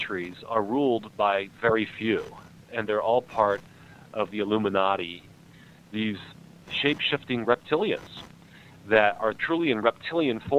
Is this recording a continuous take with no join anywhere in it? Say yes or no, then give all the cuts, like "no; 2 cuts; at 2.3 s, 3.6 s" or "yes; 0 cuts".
no; 5 cuts; at 2.6 s, 4.3 s, 5.4 s, 6.6 s, 9.4 s